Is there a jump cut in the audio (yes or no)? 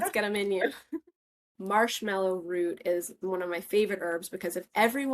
yes